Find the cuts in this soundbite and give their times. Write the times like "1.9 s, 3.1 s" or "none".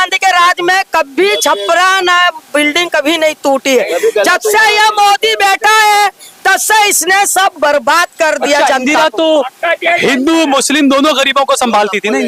none